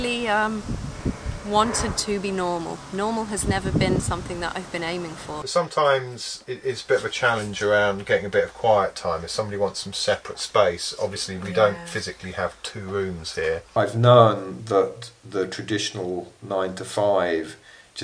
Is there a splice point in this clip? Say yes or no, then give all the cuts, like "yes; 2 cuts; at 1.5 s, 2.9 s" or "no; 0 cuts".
yes; 2 cuts; at 5.5 s, 13.7 s